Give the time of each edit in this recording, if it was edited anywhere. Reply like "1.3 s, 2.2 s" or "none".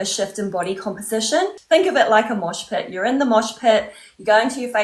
1.6 s